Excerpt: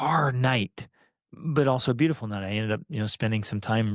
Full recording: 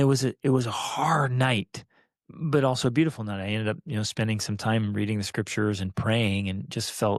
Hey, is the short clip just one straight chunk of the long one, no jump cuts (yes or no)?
yes